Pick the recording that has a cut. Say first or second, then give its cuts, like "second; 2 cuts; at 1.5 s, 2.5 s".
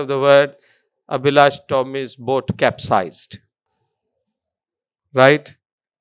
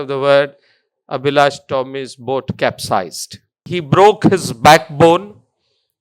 second; 1 cut; at 3.6 s